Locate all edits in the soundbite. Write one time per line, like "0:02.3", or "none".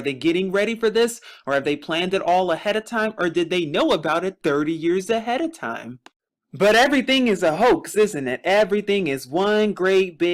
none